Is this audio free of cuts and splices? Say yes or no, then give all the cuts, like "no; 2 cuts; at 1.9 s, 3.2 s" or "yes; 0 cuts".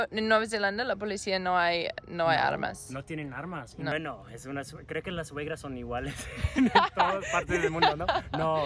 no; 1 cut; at 3.9 s